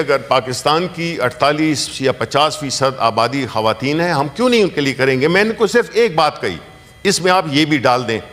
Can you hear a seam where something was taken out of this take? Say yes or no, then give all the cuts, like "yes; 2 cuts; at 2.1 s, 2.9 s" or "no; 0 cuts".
no; 0 cuts